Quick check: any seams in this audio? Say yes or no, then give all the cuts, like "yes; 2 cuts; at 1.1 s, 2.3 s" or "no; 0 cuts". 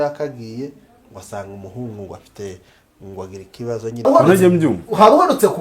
yes; 1 cut; at 4.0 s